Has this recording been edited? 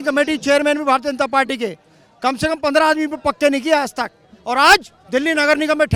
no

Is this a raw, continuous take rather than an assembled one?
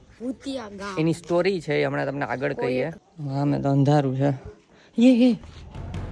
no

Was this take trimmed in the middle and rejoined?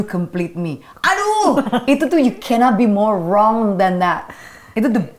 no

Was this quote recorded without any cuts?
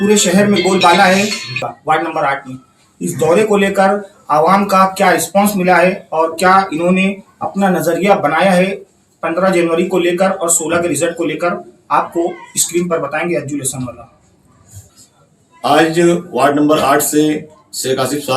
no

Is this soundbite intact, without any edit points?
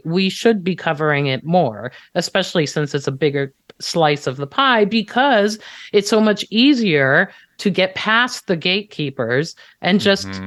yes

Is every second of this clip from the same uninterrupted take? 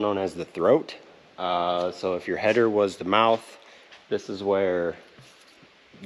yes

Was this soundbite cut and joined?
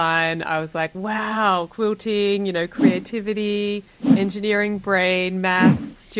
no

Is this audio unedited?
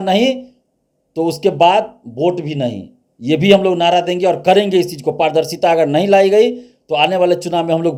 yes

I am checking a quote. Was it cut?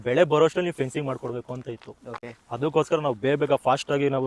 no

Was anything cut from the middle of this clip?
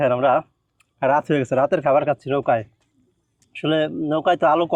no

